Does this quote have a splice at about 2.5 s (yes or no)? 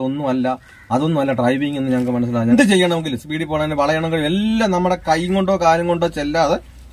yes